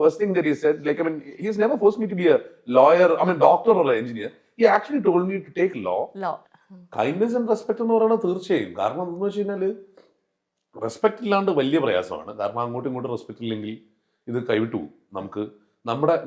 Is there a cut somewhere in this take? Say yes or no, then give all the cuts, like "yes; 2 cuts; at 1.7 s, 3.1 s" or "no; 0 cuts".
yes; 1 cut; at 6.5 s